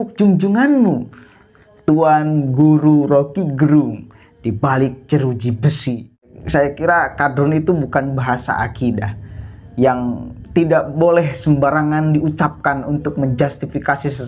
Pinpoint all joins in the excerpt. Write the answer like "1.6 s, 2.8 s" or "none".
6.4 s